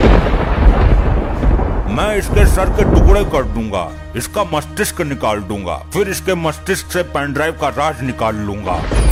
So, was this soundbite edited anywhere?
no; 0 cuts

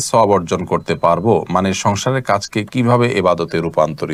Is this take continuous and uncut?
yes; 0 cuts

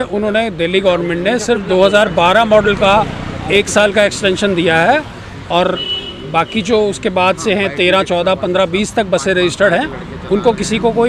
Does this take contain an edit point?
no; 0 cuts

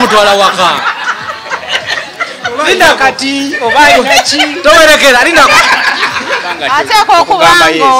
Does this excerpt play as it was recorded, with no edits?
no; 1 cut; at 6.5 s

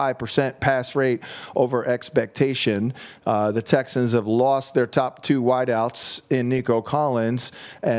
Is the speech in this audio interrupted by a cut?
no; 0 cuts

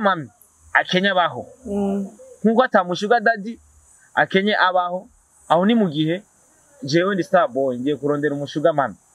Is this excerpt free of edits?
yes; 0 cuts

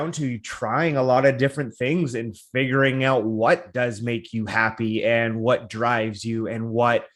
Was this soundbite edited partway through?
no; 0 cuts

